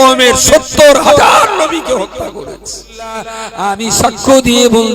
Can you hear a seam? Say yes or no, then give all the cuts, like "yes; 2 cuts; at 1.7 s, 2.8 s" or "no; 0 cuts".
yes; 1 cut; at 3.3 s